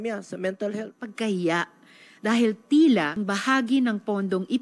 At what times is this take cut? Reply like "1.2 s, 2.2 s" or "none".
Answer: 1.0 s, 3.2 s

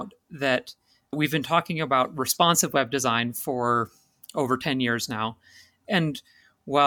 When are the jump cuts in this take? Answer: 1.1 s, 5.8 s

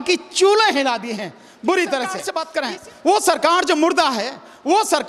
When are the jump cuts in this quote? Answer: 2.3 s

